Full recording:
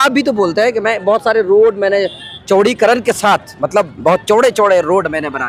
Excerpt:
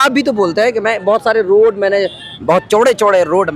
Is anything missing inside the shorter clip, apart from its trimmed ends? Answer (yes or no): yes